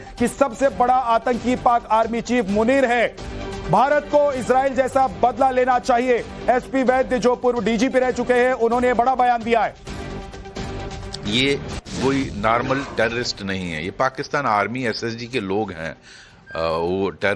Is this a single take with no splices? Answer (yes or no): no